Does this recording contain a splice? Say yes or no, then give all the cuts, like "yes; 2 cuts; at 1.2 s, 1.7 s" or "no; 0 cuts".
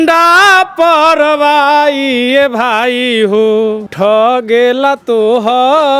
yes; 1 cut; at 3.9 s